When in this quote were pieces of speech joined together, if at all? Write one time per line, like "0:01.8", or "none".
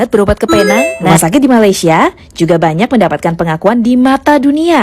0:01.0

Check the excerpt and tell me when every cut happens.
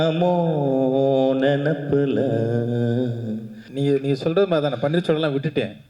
0:03.6

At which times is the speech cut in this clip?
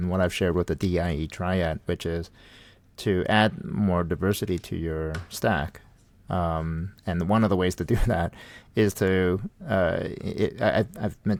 none

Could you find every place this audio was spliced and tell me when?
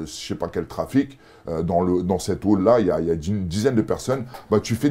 none

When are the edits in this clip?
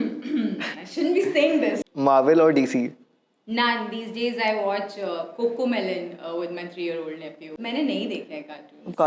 0:01.8
0:07.6

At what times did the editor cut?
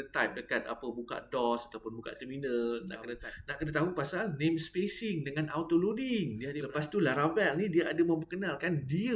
0:03.2
0:06.5

